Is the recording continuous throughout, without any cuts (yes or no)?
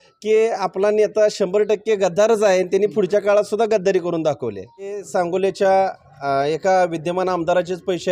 no